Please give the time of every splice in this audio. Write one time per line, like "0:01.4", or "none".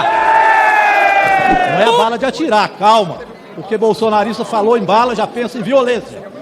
0:02.0